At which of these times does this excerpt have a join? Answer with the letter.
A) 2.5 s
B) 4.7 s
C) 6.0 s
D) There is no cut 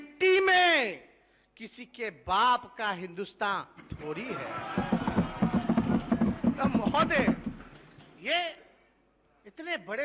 D